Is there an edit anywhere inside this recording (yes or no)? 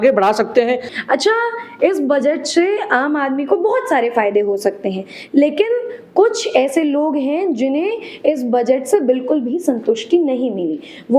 no